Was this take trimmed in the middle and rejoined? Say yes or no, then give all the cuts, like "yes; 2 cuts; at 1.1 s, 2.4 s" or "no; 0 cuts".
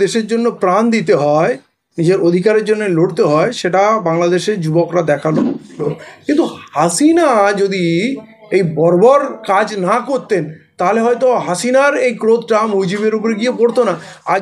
yes; 1 cut; at 5.9 s